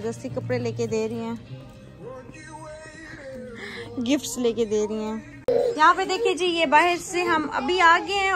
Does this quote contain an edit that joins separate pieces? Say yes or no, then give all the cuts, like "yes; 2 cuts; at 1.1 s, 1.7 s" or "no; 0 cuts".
no; 0 cuts